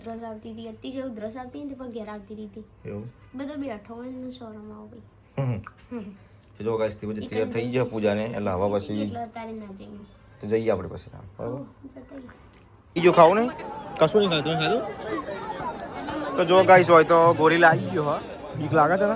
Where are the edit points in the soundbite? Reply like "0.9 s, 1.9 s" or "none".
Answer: 12.9 s